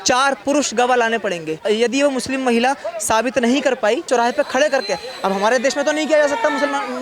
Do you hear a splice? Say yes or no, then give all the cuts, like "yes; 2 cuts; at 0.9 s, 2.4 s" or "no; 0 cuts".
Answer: yes; 2 cuts; at 1.6 s, 4.1 s